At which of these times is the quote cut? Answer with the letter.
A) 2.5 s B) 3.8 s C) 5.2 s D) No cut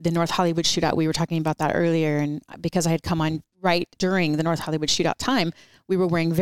B